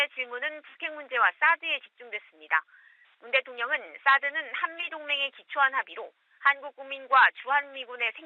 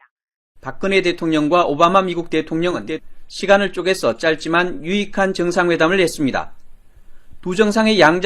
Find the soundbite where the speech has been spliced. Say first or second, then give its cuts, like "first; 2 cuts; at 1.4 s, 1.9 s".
second; 1 cut; at 6.1 s